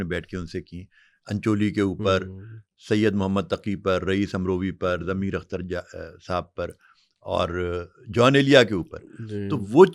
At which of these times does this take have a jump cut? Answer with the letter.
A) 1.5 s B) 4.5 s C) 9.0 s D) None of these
D